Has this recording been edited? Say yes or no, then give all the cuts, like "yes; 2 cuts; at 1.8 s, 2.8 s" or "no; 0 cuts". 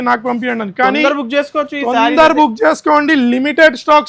no; 0 cuts